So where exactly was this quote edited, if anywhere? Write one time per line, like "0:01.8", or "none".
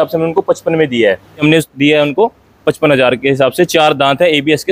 0:01.4